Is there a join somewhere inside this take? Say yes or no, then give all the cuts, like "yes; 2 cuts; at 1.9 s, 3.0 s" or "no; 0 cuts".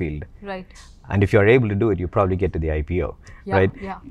no; 0 cuts